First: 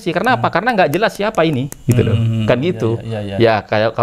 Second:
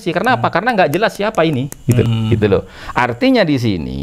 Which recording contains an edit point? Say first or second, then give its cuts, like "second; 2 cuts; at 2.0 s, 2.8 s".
second; 1 cut; at 2.1 s